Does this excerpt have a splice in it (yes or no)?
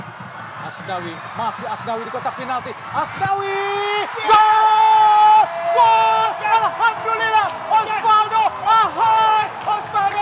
no